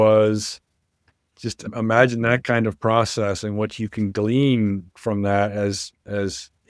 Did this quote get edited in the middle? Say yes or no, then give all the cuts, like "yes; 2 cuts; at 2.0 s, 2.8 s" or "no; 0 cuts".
yes; 1 cut; at 1.7 s